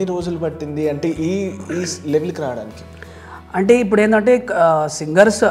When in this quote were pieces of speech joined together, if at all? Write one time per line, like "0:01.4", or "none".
none